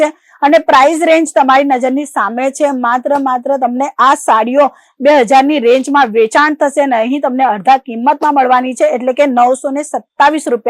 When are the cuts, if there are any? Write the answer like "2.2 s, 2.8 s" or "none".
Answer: none

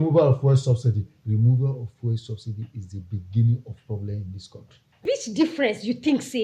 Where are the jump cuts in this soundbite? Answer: 1.1 s, 5.0 s

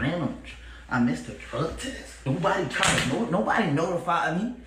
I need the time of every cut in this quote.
2.2 s

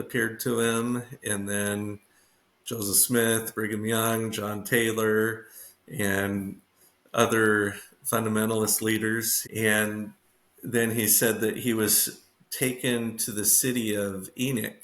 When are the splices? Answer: 9.3 s

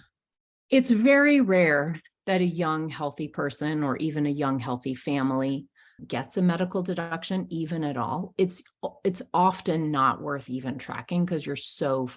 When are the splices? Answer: 6.0 s

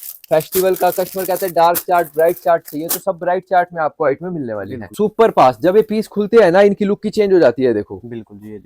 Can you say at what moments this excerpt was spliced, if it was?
4.8 s

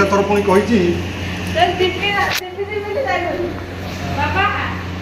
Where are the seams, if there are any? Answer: none

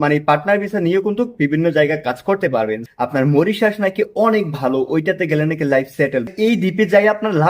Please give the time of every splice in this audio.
2.8 s, 6.3 s

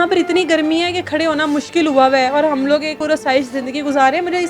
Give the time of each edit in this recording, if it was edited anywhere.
2.9 s

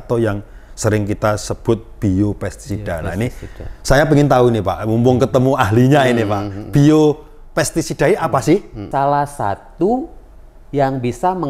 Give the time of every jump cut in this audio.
8.8 s

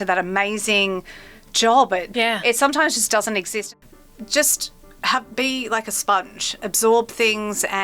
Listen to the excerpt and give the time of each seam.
2.1 s, 3.5 s

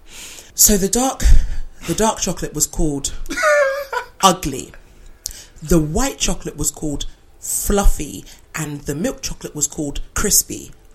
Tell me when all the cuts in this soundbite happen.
10.1 s

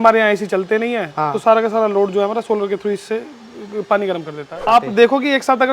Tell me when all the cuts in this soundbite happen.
4.5 s

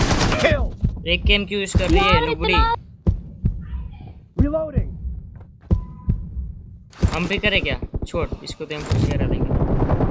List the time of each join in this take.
none

